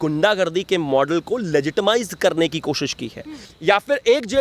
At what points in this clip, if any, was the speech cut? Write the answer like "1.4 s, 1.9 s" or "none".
3.4 s